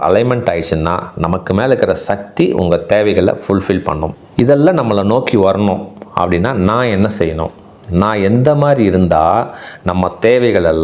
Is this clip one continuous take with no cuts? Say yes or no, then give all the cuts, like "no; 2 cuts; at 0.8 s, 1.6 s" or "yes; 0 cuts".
no; 1 cut; at 4.1 s